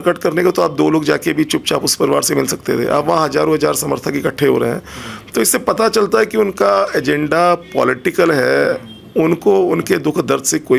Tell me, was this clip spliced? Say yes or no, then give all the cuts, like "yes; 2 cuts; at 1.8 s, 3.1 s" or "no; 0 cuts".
no; 0 cuts